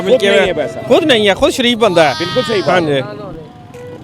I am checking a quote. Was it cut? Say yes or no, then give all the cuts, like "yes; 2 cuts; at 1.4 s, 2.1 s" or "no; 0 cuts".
no; 0 cuts